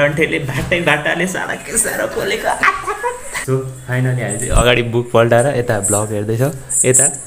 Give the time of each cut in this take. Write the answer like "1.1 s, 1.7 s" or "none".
3.3 s